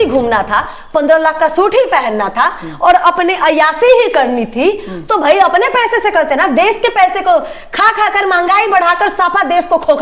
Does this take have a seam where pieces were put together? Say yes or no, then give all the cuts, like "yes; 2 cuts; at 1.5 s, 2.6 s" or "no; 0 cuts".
no; 0 cuts